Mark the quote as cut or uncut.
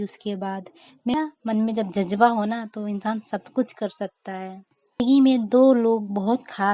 cut